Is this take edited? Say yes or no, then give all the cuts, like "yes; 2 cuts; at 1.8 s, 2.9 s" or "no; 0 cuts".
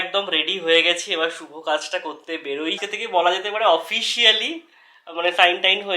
yes; 1 cut; at 2.9 s